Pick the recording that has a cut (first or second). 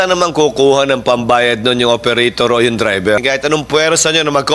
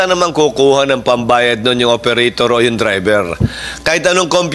first